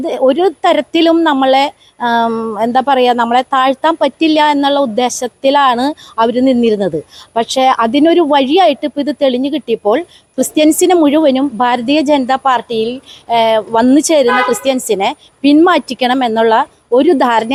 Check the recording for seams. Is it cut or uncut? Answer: uncut